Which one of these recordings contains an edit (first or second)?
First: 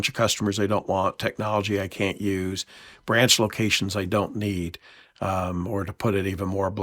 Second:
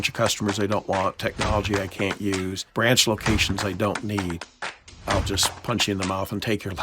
second